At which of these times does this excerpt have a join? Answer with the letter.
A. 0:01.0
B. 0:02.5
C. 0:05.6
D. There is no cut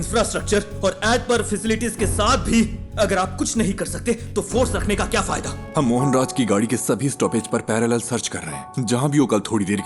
C